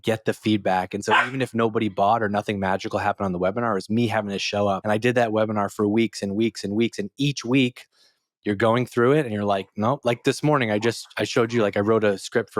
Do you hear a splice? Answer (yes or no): yes